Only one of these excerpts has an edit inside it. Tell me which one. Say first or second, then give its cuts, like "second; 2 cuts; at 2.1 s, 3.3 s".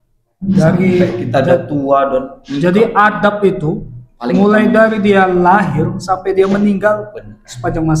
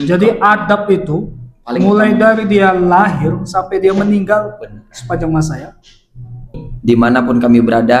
second; 1 cut; at 6.6 s